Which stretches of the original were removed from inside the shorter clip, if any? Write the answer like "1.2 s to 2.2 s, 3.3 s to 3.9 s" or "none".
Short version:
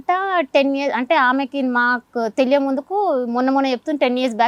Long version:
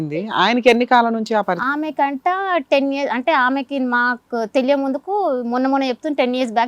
none